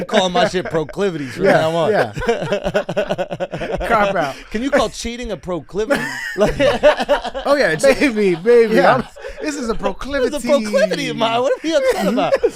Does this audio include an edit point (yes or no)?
no